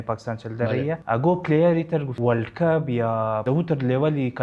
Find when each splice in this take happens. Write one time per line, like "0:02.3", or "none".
0:01.0
0:02.1
0:03.4